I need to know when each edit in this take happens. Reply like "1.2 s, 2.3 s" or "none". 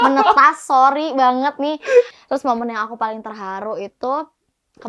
2.2 s